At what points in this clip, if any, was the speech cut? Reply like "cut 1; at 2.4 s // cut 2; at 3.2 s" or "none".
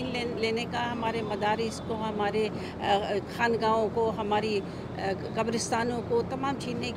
none